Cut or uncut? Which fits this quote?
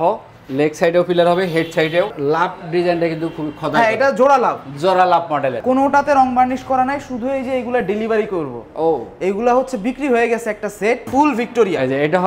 cut